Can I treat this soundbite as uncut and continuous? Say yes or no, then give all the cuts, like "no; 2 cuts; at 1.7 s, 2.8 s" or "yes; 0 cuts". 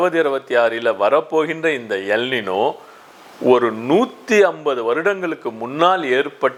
yes; 0 cuts